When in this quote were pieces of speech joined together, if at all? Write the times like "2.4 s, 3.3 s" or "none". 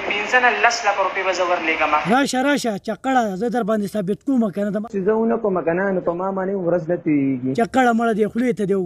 4.8 s

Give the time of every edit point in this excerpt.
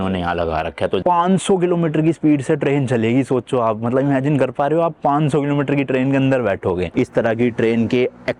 1.0 s, 6.9 s

